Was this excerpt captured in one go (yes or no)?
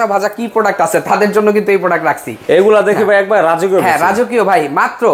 yes